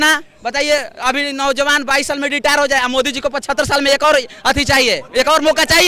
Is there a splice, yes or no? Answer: no